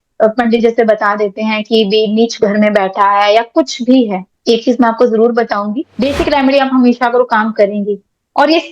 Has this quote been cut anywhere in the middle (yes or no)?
yes